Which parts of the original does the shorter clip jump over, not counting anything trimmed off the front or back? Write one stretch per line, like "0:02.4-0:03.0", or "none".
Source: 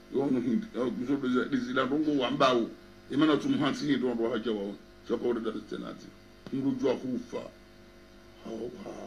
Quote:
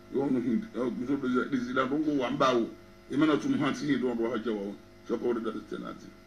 none